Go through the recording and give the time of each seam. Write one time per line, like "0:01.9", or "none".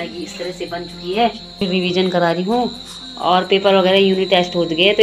0:01.6

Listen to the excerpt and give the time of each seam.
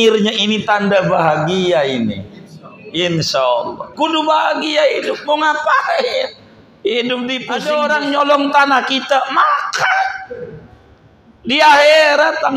0:07.5

